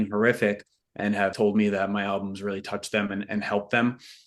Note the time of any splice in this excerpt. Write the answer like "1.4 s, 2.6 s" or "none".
1.3 s